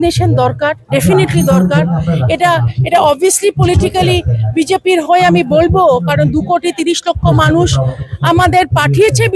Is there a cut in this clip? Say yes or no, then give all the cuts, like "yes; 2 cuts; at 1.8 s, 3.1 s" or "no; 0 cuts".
no; 0 cuts